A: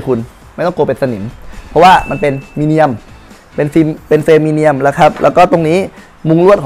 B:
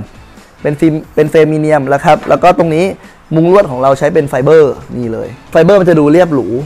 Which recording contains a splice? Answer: B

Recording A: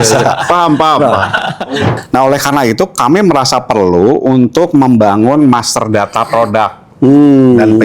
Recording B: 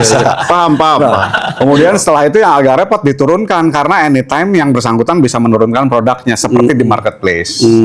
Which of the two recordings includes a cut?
A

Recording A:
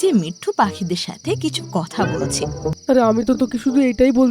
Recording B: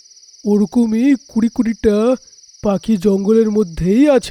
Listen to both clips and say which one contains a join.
A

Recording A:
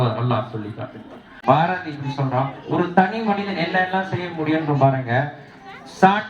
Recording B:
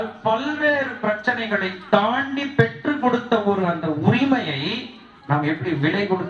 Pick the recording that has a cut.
A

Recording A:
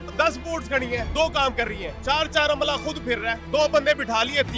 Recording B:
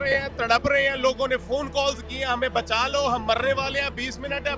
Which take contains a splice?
A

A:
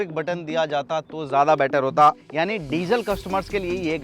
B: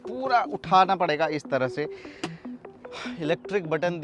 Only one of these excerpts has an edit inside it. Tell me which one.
A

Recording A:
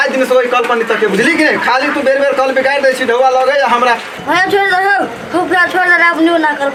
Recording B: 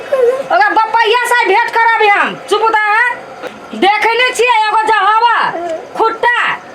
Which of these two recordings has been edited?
B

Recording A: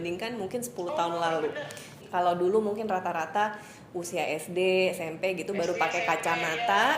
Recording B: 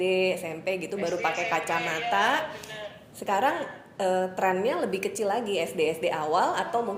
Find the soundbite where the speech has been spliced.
A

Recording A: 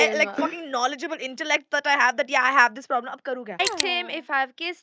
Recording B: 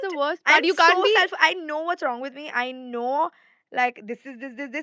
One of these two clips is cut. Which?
A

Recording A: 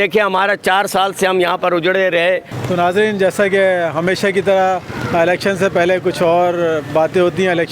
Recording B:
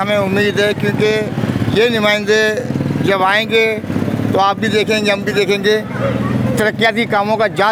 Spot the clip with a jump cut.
A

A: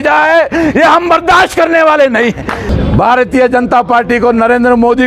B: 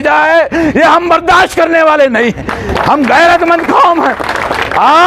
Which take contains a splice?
A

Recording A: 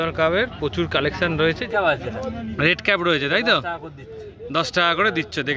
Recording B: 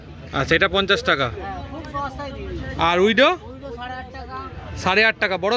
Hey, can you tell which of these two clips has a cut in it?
A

